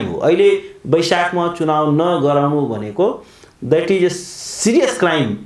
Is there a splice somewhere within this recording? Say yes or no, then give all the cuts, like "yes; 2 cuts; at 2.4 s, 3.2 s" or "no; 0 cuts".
no; 0 cuts